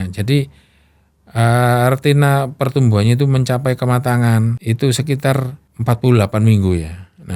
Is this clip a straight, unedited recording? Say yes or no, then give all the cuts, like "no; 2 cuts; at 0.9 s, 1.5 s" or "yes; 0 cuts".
no; 2 cuts; at 4.6 s, 5.6 s